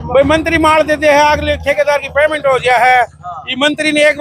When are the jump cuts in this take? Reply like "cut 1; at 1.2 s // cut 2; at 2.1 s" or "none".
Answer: none